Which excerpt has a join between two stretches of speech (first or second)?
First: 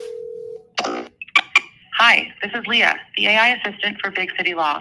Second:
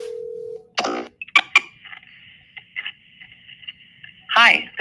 first